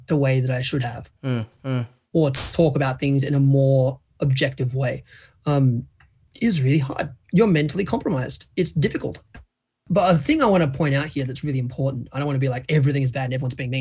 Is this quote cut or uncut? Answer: uncut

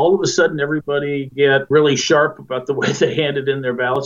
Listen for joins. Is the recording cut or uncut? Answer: cut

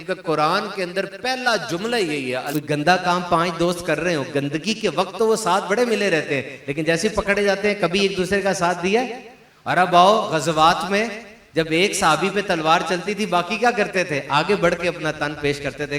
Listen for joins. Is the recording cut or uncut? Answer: cut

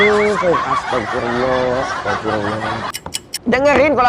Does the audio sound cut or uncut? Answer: cut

